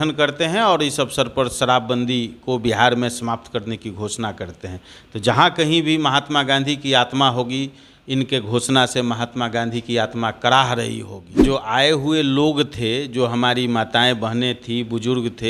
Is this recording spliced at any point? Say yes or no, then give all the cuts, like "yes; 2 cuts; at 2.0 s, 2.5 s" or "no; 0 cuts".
yes; 1 cut; at 11.2 s